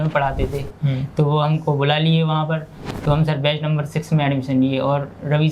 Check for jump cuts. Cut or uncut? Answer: cut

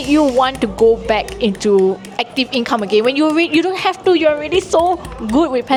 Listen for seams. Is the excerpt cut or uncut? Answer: uncut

